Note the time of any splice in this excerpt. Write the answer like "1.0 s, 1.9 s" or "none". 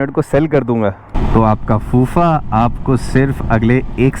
1.1 s